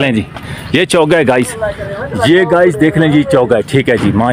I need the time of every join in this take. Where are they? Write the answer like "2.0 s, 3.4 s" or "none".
none